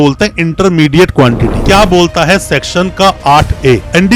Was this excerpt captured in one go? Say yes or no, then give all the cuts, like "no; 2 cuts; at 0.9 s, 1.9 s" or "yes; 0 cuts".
no; 1 cut; at 1.6 s